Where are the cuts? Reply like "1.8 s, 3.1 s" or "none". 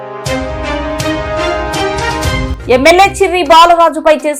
2.5 s